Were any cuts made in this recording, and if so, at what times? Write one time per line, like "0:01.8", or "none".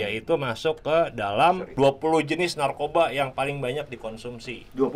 0:01.7